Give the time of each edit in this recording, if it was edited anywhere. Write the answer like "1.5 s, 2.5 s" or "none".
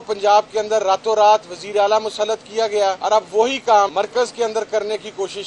3.0 s, 3.9 s